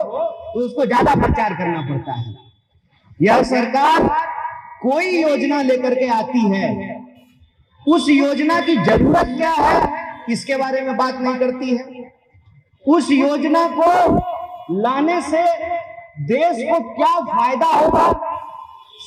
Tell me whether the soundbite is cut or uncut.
uncut